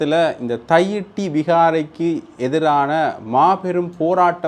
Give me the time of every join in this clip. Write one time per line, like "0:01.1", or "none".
none